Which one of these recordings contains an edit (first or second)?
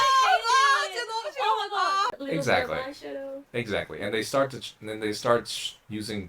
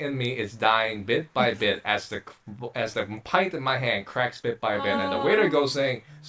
first